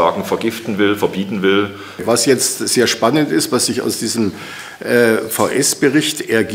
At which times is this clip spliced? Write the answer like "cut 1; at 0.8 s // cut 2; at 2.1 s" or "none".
cut 1; at 2.0 s